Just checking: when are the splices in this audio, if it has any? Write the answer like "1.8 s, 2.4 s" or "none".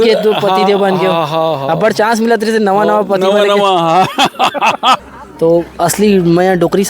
5.0 s